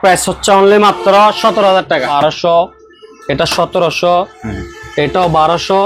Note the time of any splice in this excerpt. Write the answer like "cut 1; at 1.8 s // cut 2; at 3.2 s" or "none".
cut 1; at 2.1 s